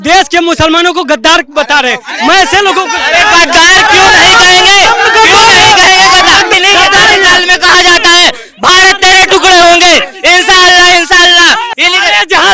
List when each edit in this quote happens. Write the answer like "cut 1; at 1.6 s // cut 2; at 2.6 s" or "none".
cut 1; at 6.5 s // cut 2; at 11.7 s